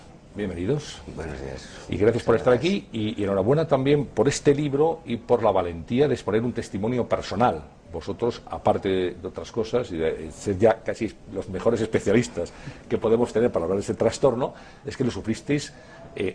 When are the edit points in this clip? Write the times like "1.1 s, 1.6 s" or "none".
2.4 s